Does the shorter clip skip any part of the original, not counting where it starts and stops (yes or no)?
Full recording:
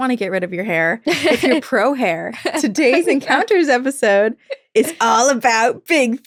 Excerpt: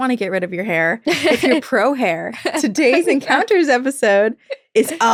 no